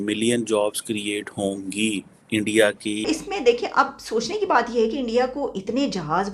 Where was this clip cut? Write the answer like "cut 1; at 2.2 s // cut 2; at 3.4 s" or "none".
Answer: cut 1; at 3.1 s